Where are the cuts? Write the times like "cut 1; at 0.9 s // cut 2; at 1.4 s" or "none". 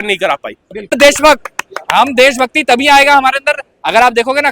cut 1; at 0.9 s